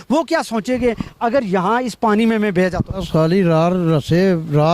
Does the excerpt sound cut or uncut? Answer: cut